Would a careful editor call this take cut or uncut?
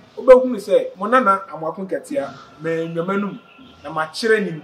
cut